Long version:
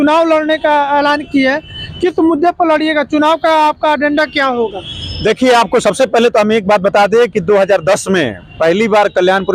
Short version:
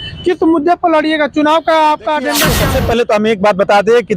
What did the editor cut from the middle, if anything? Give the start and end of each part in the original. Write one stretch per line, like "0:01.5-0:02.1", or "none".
0:04.4-0:05.9